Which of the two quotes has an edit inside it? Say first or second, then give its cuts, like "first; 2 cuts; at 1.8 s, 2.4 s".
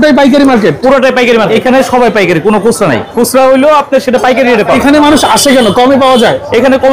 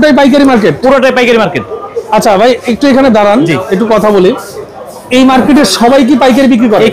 first; 3 cuts; at 1.5 s, 3.1 s, 4.7 s